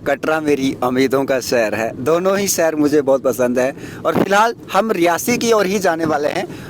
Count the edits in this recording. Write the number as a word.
zero